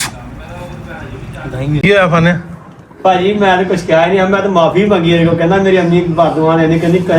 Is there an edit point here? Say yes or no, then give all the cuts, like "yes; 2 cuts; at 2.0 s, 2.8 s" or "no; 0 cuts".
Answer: yes; 1 cut; at 1.8 s